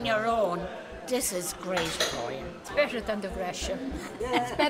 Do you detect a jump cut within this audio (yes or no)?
no